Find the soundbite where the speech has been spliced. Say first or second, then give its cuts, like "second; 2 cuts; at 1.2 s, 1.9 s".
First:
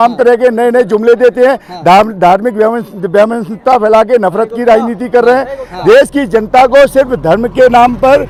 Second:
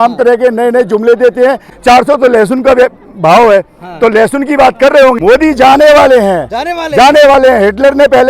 second; 2 cuts; at 1.7 s, 5.2 s